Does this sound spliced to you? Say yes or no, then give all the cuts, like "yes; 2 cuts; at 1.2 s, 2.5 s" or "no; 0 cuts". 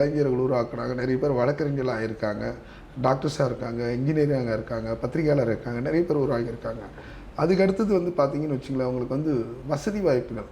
no; 0 cuts